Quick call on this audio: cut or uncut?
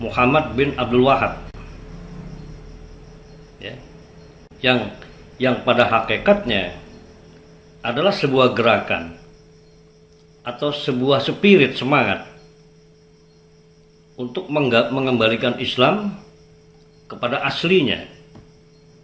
uncut